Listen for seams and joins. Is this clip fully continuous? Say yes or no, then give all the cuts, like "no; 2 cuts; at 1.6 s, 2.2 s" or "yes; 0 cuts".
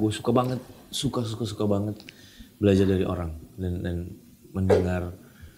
yes; 0 cuts